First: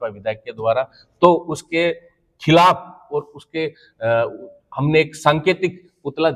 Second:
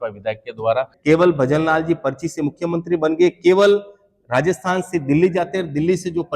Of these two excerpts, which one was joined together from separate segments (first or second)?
second